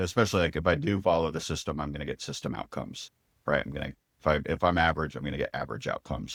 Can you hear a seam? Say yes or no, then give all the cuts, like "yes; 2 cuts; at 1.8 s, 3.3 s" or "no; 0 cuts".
no; 0 cuts